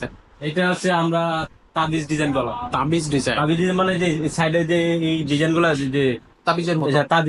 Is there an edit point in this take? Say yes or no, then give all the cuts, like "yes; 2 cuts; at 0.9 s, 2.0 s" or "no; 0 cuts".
no; 0 cuts